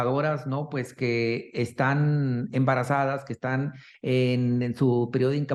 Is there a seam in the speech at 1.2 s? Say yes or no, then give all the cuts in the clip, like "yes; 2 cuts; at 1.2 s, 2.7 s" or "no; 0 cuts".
no; 0 cuts